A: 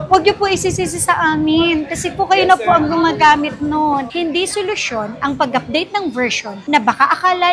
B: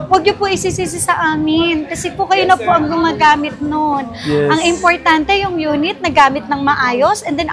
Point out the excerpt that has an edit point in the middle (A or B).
A